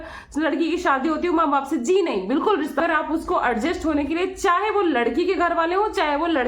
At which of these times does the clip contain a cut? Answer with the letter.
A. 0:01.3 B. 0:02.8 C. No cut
B